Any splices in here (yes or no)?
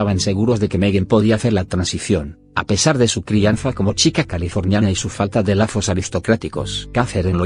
yes